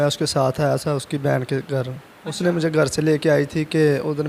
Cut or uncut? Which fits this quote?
uncut